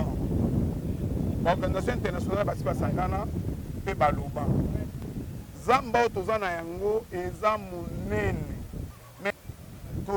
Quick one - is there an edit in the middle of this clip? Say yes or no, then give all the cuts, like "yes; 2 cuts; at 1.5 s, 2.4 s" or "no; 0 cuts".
yes; 2 cuts; at 5.0 s, 9.0 s